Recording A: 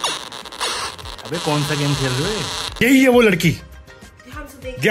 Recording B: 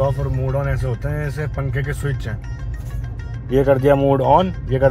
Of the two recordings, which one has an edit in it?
A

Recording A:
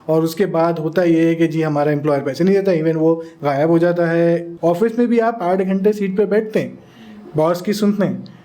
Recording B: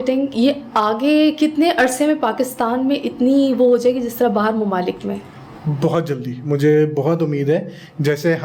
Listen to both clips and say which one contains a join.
A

